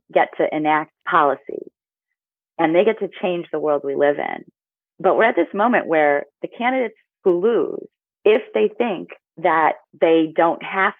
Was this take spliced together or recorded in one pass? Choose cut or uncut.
cut